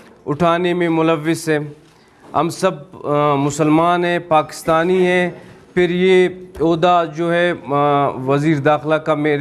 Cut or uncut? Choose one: uncut